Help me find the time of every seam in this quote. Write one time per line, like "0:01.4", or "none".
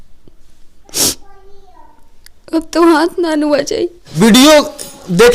0:04.0

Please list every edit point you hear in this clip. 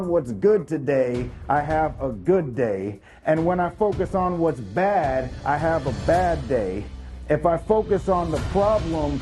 none

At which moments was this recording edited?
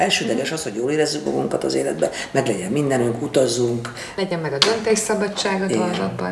0:04.0

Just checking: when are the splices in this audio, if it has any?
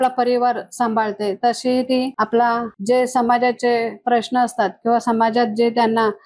0:02.1
0:02.7

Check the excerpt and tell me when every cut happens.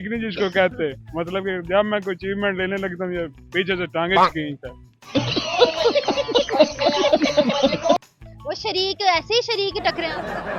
none

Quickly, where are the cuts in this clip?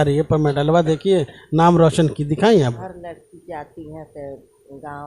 0:02.6

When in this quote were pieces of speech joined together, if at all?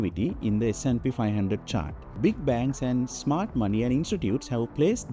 0:02.2

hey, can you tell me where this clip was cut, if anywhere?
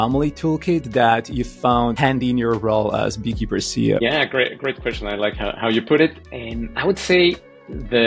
0:02.0
0:04.0

